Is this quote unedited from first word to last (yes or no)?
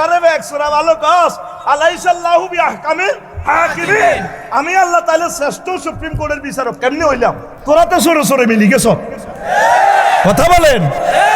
no